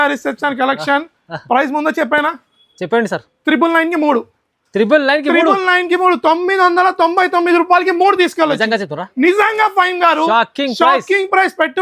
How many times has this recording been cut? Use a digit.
0